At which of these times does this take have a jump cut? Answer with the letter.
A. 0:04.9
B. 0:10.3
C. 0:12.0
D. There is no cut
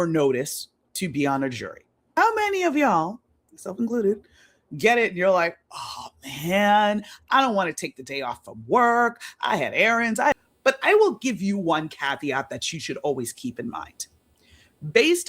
B